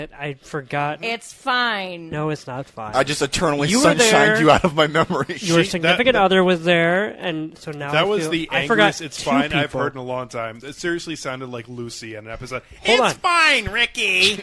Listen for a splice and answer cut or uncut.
uncut